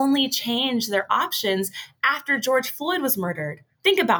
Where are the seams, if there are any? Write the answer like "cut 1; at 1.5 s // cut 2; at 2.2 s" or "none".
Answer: none